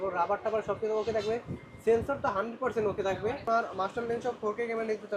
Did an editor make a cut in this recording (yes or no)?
yes